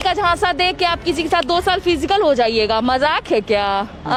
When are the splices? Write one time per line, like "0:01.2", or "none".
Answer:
none